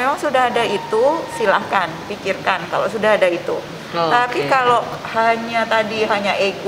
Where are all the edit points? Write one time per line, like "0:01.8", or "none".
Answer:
none